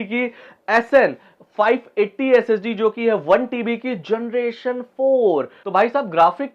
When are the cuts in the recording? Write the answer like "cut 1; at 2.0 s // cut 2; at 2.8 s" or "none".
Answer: cut 1; at 5.6 s